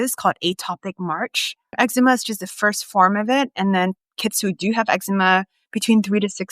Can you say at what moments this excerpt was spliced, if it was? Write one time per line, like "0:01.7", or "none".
0:01.7